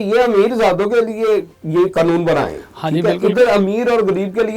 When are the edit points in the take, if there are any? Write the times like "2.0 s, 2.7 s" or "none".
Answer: none